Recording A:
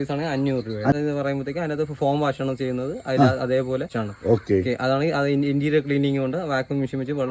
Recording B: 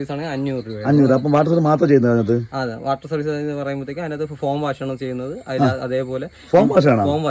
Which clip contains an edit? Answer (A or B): A